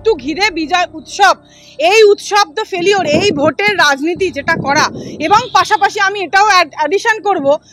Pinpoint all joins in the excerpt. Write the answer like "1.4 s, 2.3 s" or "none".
none